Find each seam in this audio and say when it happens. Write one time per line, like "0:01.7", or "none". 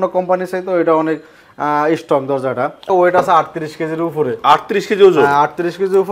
0:02.9